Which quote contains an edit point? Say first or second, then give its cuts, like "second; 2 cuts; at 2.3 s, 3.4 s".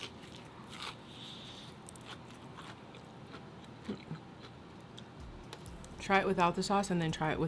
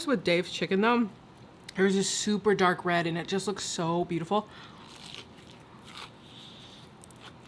first; 1 cut; at 4.6 s